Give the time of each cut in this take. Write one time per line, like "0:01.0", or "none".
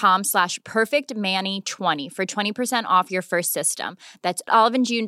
0:02.0